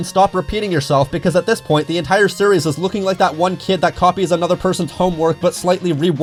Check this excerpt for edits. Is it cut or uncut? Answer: uncut